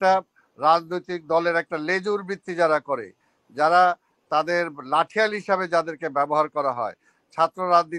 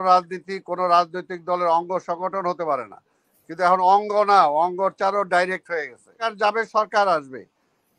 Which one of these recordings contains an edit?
second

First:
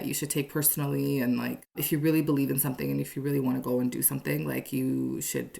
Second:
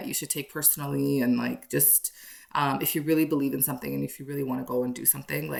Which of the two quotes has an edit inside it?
first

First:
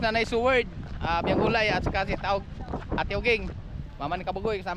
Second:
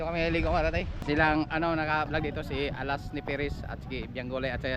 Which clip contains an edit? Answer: second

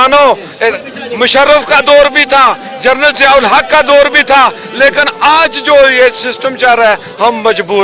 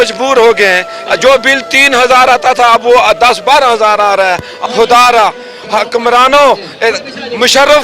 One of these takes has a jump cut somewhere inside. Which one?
second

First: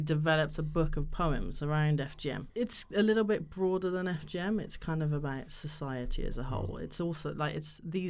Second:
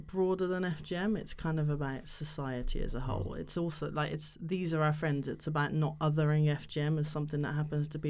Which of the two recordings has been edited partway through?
first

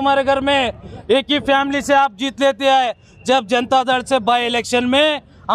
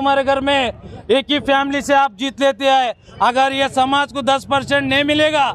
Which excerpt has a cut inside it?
second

